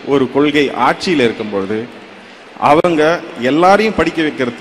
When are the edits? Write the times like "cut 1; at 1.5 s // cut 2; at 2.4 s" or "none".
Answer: none

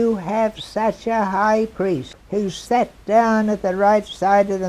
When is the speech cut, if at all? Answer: cut 1; at 2.1 s

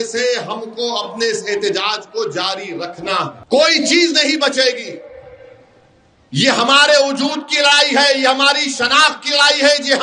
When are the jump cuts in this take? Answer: cut 1; at 3.4 s

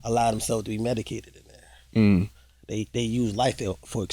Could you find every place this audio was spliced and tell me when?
none

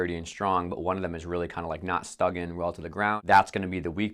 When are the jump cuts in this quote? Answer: cut 1; at 3.2 s

